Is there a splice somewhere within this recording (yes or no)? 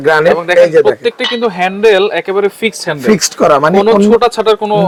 no